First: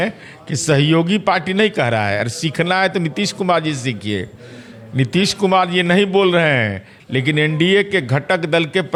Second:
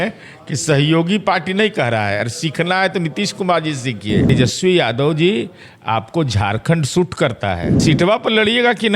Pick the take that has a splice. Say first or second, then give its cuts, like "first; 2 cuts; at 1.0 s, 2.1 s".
second; 2 cuts; at 4.3 s, 7.7 s